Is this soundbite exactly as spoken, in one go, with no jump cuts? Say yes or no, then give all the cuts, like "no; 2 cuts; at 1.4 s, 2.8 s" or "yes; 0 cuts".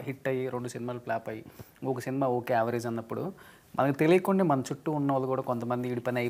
yes; 0 cuts